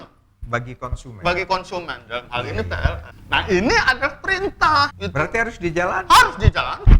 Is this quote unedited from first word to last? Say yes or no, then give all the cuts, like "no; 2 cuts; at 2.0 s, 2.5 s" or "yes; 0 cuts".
no; 2 cuts; at 3.1 s, 5.0 s